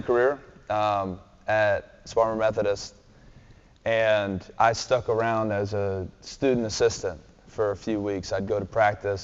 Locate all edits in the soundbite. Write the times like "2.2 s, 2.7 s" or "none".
none